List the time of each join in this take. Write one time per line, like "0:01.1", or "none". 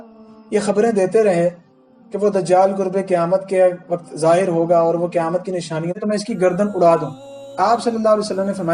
0:06.0